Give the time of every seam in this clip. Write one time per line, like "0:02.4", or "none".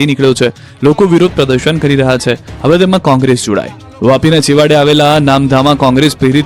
0:01.2